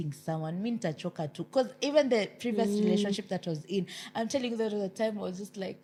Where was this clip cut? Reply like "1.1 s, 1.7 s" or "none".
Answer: none